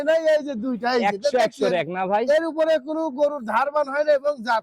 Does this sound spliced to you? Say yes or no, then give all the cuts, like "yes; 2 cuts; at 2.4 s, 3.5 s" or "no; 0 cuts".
no; 0 cuts